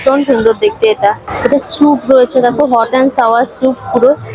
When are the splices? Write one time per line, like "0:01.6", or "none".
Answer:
0:01.5